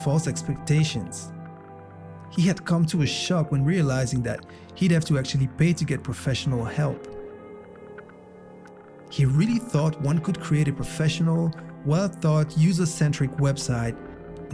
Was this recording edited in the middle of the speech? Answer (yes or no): no